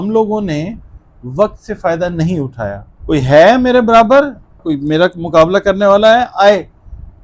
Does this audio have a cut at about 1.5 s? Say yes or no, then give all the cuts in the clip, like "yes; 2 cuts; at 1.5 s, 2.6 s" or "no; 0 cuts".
no; 1 cut; at 2.9 s